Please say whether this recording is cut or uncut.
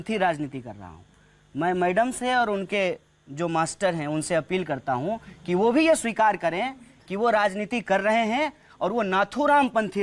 uncut